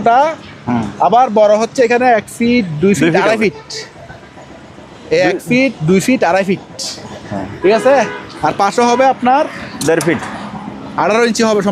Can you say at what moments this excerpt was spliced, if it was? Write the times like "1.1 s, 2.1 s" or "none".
none